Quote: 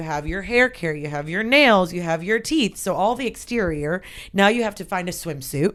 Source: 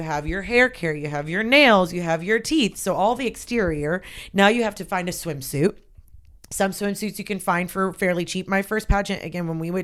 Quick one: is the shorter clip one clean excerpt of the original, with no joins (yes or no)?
yes